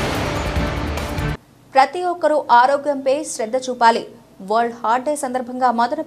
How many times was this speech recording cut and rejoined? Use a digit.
1